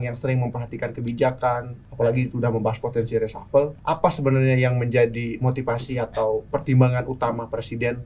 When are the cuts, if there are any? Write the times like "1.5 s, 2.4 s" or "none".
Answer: 1.8 s, 3.8 s